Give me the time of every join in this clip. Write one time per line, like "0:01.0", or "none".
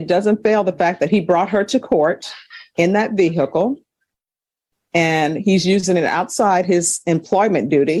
none